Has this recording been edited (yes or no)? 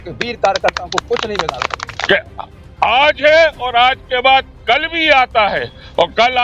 yes